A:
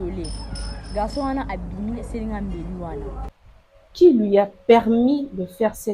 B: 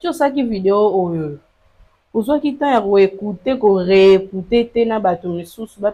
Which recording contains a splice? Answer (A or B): A